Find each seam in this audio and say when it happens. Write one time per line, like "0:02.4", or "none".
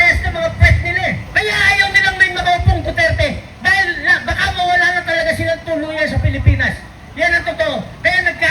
0:01.3

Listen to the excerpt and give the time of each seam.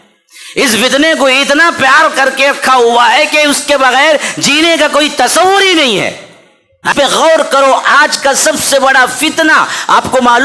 0:06.9

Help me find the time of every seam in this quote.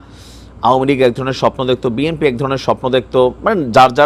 none

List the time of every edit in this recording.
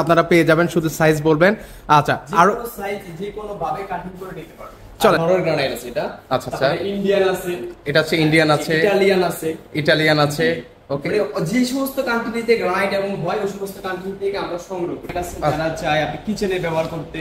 0:05.2
0:15.5

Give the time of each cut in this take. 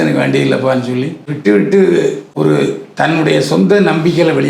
0:01.3
0:02.2

